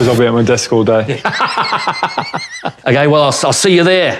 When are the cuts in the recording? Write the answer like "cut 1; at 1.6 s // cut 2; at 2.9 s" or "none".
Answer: cut 1; at 3.3 s